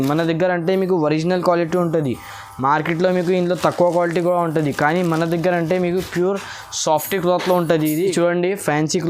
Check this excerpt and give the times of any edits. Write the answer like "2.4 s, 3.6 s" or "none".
8.1 s